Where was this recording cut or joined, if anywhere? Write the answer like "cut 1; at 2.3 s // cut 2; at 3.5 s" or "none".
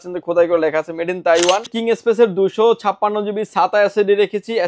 cut 1; at 1.7 s